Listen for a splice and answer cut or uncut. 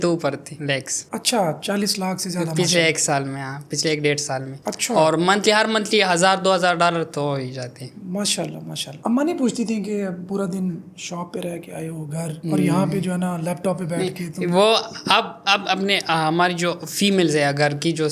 uncut